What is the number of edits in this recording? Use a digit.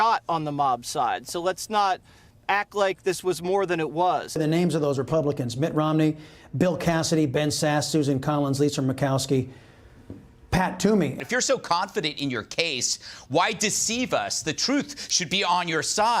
2